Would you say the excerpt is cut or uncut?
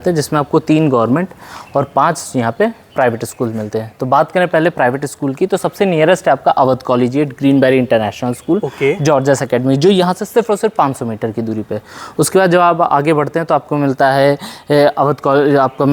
uncut